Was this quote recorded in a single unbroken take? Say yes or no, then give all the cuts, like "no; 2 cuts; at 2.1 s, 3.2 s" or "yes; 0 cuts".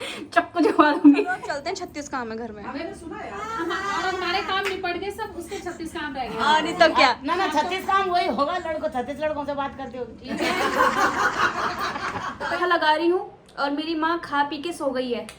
no; 2 cuts; at 1.5 s, 12.6 s